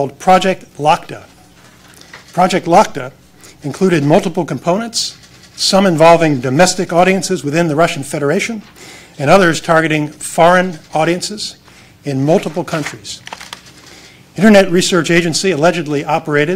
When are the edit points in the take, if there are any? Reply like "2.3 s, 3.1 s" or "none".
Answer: 10.9 s